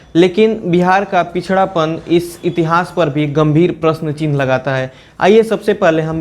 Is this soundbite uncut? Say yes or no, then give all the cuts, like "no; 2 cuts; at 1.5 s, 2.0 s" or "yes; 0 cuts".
yes; 0 cuts